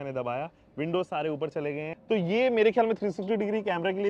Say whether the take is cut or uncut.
cut